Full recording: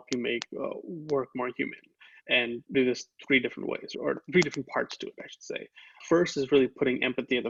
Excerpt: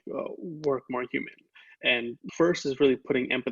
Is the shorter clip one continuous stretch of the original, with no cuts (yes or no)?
no